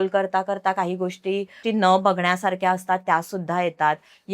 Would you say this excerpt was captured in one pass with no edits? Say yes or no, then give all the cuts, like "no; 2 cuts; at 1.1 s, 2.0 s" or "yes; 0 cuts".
no; 1 cut; at 1.6 s